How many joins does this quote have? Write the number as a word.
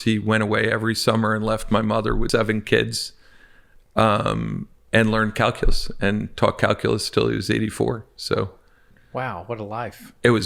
two